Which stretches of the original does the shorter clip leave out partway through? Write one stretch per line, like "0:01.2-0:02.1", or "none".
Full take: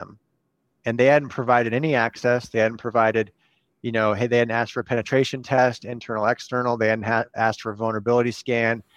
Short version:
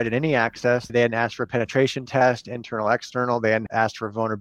0:02.5-0:04.3
0:07.0-0:07.3